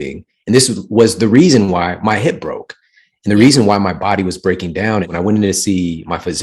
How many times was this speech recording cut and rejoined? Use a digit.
1